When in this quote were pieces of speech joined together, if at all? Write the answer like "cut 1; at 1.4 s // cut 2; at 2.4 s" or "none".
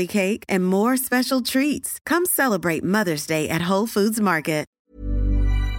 cut 1; at 4.8 s